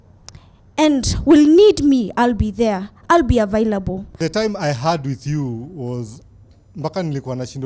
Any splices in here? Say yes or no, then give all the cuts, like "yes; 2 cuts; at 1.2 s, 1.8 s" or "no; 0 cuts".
yes; 1 cut; at 4.2 s